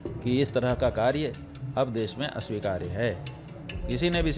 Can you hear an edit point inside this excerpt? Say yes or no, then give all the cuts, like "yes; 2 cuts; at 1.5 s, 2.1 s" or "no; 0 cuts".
no; 0 cuts